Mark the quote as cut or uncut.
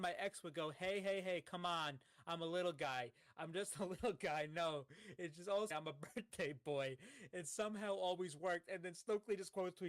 cut